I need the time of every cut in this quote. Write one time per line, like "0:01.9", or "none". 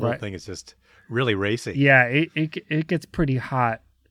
none